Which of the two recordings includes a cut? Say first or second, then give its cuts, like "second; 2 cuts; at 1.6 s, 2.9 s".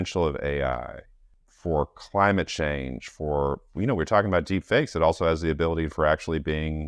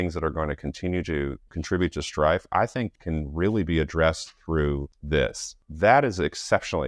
second; 4 cuts; at 1.5 s, 2.9 s, 4.9 s, 5.6 s